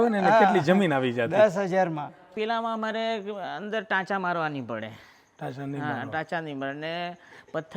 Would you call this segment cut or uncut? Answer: cut